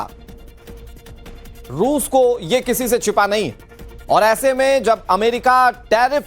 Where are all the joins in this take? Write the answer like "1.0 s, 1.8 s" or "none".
4.8 s

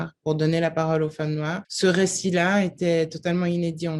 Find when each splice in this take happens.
1.6 s

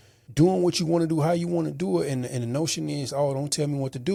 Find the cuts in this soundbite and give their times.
none

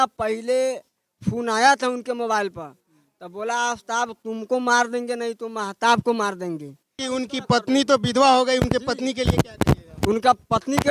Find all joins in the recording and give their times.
7.0 s

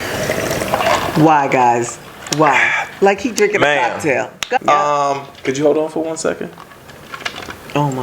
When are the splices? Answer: 4.6 s

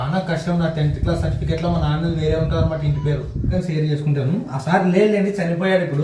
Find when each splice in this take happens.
3.5 s

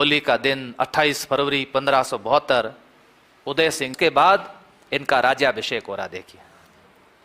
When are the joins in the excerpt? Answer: 3.9 s

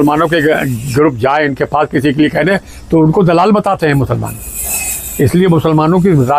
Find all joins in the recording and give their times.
none

